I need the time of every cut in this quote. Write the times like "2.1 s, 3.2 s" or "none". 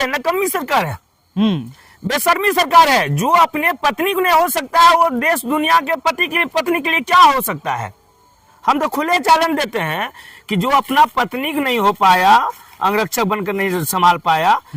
none